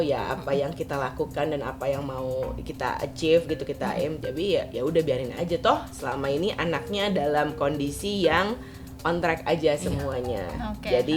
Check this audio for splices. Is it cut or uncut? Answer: uncut